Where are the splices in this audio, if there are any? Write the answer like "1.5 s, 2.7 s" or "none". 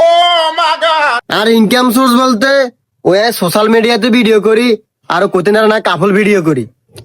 1.2 s